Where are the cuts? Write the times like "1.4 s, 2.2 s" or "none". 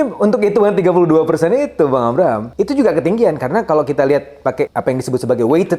2.5 s, 4.7 s